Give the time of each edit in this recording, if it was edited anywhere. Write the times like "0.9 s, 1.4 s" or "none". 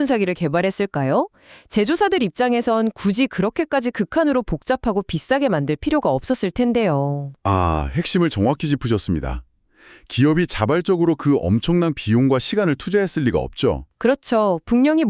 none